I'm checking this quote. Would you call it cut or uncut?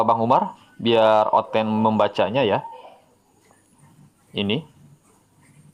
uncut